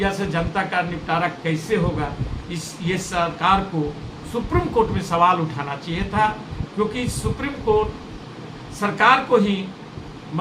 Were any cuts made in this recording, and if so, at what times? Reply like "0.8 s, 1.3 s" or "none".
none